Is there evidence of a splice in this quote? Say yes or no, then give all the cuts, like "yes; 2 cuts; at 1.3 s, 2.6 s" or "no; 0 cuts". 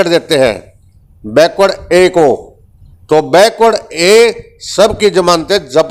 no; 0 cuts